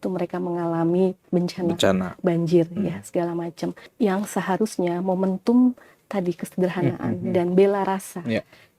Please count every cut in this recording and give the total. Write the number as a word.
two